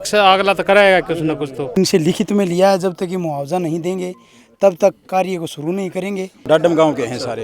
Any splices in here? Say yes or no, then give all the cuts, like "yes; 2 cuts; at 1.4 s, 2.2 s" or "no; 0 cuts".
yes; 2 cuts; at 1.8 s, 6.5 s